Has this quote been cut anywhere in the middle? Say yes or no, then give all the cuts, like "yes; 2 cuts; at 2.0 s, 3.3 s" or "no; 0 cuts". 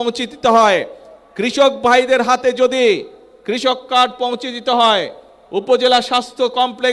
no; 0 cuts